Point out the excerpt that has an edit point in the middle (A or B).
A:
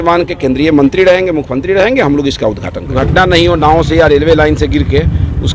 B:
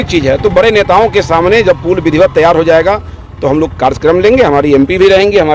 A